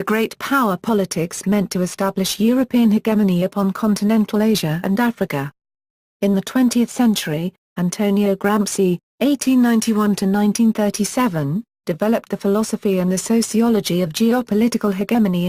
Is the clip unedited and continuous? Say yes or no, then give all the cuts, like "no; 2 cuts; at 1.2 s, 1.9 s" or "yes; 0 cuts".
no; 1 cut; at 10.8 s